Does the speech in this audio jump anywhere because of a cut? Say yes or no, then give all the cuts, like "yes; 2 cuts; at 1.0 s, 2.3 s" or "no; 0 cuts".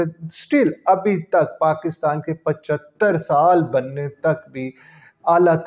no; 0 cuts